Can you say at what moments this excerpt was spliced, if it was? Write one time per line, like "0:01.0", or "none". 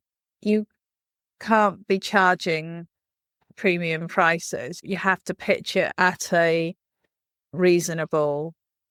none